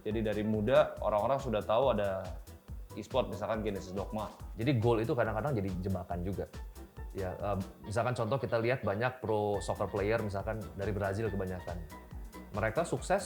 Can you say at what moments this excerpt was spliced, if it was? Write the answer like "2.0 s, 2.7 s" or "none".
4.4 s